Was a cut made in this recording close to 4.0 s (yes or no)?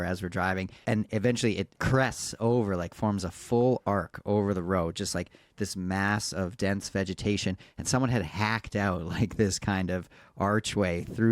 no